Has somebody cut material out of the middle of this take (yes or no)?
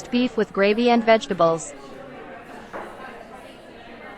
yes